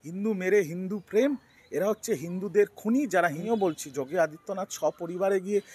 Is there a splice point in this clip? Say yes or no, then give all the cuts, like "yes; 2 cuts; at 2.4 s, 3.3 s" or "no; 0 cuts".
yes; 1 cut; at 3.4 s